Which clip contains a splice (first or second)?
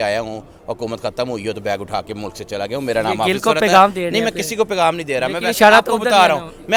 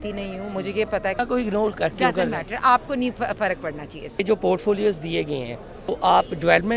second